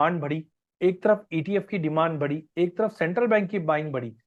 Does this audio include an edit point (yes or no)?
no